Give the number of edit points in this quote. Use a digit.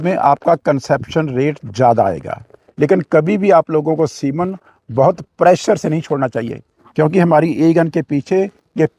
1